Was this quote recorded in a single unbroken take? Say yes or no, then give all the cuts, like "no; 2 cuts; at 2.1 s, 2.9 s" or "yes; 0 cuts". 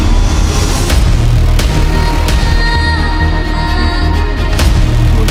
yes; 0 cuts